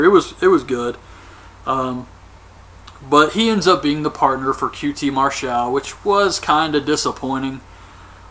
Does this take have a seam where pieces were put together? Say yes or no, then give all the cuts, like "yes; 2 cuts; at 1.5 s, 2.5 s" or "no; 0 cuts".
yes; 1 cut; at 5.1 s